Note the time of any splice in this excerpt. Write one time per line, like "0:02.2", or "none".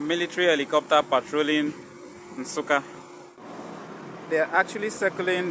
none